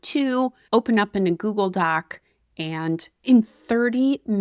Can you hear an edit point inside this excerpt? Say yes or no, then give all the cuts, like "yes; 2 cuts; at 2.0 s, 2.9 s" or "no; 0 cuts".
yes; 1 cut; at 3.2 s